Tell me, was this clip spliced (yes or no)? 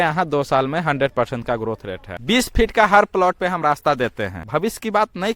yes